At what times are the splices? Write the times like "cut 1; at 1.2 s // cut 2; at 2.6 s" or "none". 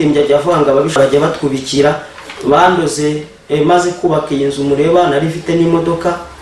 cut 1; at 1.0 s